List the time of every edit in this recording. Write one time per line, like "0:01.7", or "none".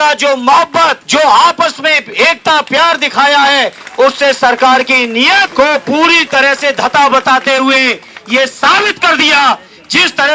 0:01.0
0:05.5